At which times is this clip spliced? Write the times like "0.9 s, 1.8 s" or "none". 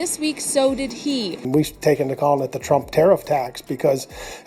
1.4 s

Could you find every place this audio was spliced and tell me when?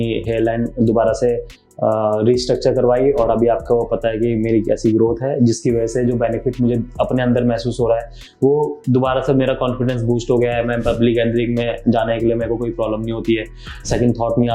none

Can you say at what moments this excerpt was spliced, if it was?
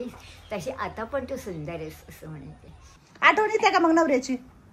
2.9 s

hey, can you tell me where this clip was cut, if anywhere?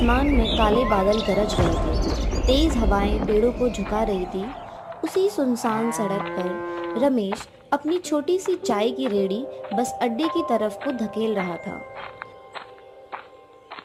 none

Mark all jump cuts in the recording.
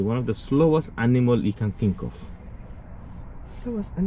none

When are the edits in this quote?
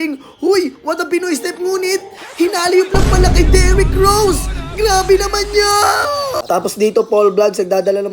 6.4 s

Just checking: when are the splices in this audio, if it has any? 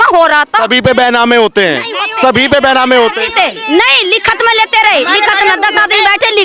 none

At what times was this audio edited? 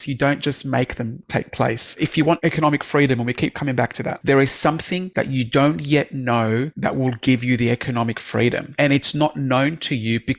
2.2 s, 4.1 s, 5.0 s, 6.7 s, 8.7 s

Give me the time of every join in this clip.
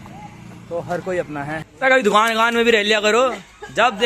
1.7 s

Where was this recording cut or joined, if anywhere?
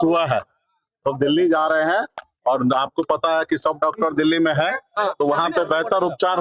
none

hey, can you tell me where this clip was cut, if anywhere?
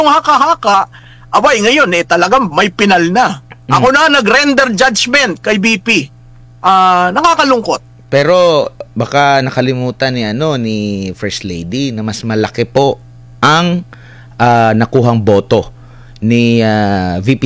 none

